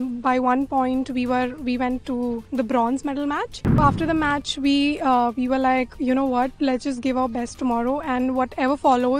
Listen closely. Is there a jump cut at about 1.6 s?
no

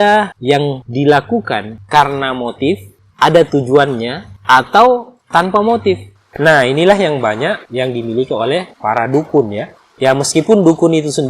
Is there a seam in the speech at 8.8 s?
no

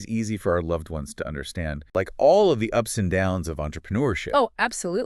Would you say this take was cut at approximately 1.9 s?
yes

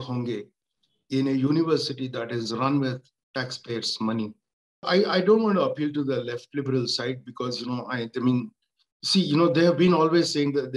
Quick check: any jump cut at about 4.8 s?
yes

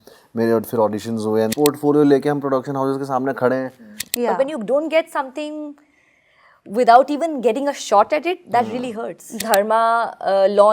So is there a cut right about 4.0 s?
yes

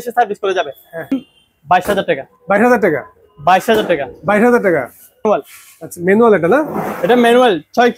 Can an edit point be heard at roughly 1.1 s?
yes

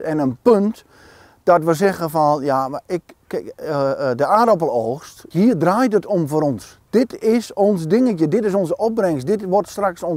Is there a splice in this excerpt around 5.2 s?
yes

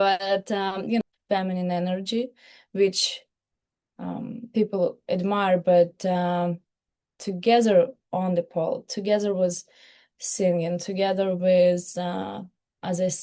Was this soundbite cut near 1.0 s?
yes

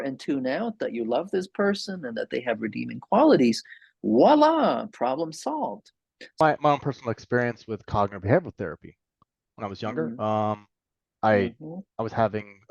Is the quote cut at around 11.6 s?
no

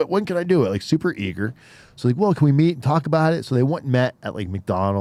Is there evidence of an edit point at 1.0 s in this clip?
no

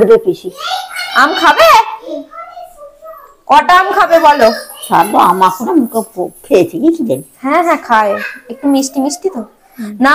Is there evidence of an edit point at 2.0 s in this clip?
no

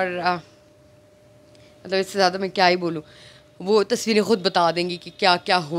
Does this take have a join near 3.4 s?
no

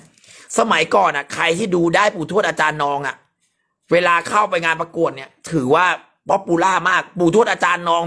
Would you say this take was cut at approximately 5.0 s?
no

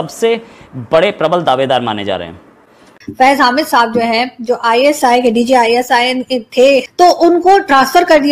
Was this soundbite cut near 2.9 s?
yes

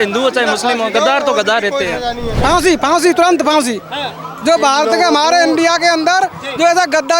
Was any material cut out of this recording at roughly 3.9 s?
no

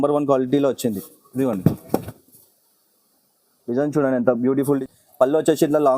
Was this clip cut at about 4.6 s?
yes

